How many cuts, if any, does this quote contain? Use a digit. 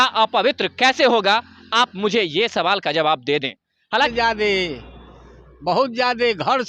1